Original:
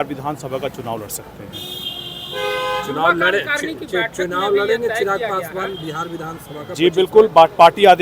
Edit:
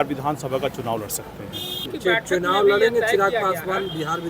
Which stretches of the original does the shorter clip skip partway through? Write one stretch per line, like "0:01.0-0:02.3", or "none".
0:01.9-0:03.8